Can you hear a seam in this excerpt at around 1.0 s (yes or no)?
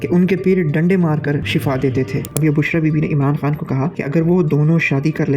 no